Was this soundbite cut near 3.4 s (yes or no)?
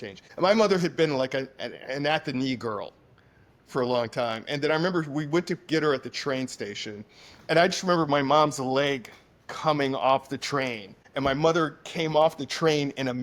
no